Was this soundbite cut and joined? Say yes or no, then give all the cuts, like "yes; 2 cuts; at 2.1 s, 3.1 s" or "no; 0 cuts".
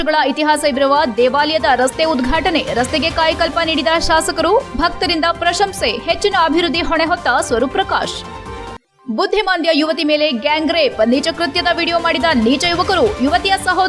no; 0 cuts